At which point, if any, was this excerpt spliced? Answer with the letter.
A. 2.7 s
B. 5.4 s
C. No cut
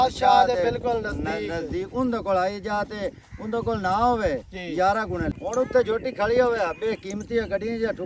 B